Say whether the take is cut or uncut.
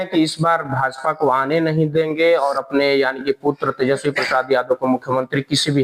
uncut